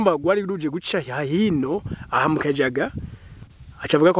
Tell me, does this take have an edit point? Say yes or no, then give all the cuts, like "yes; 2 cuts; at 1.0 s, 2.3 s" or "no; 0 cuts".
no; 0 cuts